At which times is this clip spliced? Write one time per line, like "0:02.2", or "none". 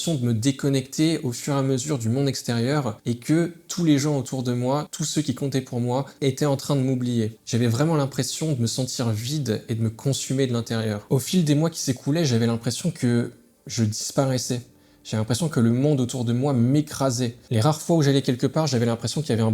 0:03.0
0:05.0
0:07.4
0:11.0